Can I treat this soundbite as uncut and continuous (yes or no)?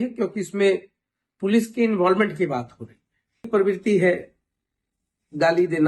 no